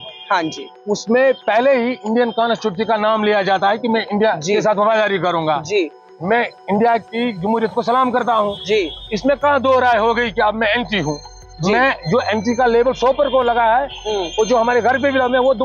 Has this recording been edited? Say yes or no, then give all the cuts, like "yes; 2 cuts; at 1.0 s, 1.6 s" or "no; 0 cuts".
no; 0 cuts